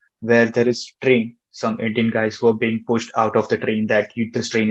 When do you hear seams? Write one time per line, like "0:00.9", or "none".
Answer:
0:01.5